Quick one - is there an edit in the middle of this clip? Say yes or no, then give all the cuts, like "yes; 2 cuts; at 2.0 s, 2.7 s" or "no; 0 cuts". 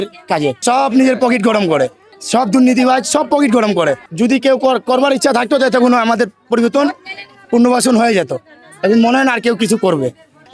no; 0 cuts